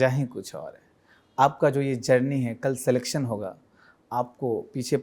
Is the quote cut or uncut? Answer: uncut